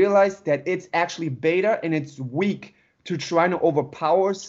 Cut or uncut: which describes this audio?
uncut